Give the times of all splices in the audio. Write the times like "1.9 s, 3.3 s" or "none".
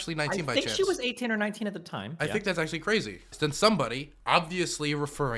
3.3 s